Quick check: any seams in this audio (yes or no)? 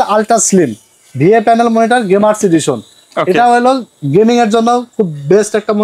no